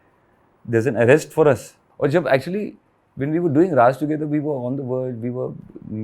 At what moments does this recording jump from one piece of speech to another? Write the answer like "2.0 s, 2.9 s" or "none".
1.8 s